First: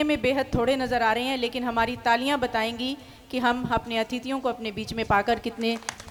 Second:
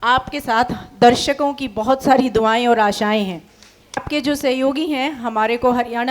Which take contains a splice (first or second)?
second